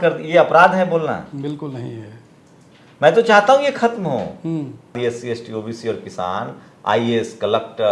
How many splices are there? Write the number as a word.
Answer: one